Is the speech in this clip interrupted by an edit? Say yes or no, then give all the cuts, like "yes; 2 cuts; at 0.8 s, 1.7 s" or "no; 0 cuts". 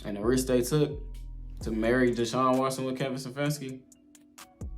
yes; 1 cut; at 3.8 s